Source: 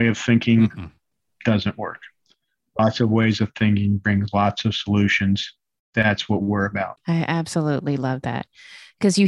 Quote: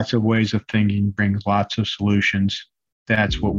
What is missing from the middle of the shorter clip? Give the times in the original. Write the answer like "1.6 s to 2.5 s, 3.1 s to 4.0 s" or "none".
none